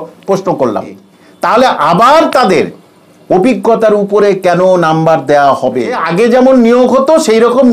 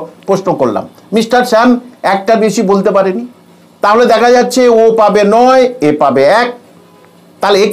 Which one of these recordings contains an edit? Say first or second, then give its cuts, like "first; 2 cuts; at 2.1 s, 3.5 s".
first; 2 cuts; at 1.0 s, 6.0 s